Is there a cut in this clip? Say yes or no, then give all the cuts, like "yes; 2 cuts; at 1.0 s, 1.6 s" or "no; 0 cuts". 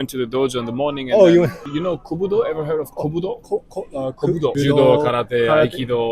yes; 2 cuts; at 1.6 s, 4.5 s